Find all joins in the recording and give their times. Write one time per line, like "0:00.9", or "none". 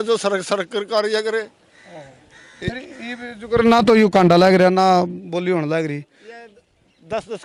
none